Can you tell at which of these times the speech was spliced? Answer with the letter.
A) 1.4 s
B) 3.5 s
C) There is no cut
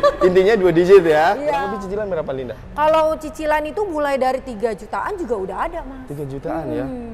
A